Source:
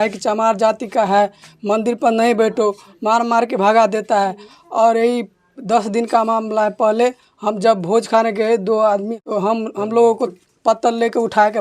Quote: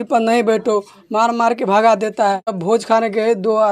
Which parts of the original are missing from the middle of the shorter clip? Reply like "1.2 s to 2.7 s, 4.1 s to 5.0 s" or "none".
4.5 s to 7.8 s